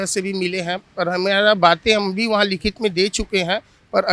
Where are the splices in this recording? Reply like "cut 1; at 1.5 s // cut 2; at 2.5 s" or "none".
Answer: none